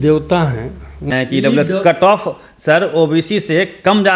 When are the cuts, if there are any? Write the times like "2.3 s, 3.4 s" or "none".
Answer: 1.1 s